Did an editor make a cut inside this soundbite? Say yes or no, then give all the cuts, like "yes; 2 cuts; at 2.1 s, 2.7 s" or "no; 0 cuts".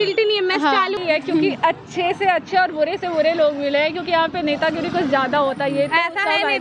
yes; 1 cut; at 1.0 s